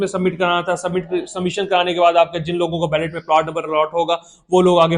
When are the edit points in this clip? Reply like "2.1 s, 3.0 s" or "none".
none

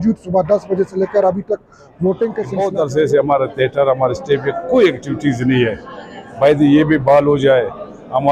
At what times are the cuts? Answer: 2.5 s

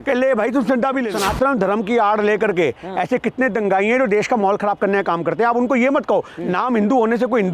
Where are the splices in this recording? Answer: 1.1 s

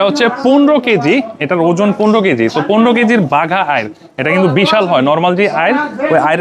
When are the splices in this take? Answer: none

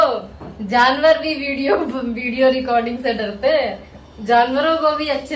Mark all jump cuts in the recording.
none

